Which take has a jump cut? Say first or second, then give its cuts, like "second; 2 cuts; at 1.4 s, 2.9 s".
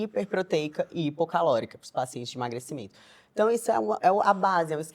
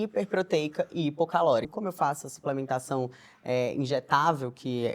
second; 1 cut; at 1.7 s